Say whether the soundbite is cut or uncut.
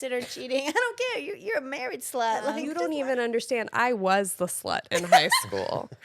cut